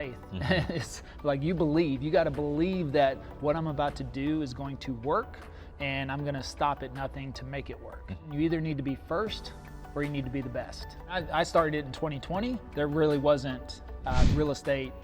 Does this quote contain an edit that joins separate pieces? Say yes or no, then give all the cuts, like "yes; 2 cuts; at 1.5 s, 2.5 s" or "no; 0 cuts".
yes; 2 cuts; at 8.2 s, 11.2 s